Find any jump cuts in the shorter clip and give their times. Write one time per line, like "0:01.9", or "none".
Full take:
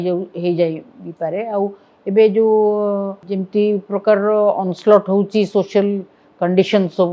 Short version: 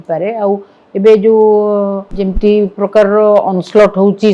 none